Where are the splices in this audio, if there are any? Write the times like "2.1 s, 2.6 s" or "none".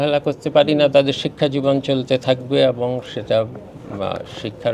none